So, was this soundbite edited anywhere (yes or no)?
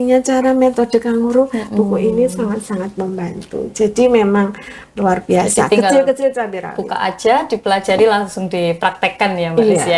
no